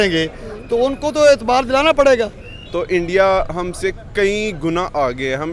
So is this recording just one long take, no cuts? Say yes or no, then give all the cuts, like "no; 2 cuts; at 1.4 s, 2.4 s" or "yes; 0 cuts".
no; 1 cut; at 2.6 s